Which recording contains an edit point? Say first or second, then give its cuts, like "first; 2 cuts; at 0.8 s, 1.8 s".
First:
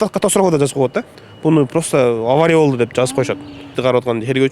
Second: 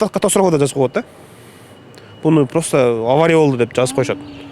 first; 2 cuts; at 1.2 s, 3.6 s